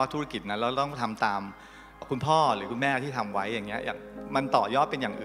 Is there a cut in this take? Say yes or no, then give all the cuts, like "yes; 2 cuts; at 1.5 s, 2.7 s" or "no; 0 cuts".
yes; 2 cuts; at 2.0 s, 4.2 s